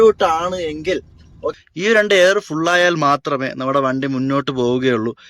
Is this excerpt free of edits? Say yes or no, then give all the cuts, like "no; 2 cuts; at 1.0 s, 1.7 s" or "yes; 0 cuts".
no; 1 cut; at 1.5 s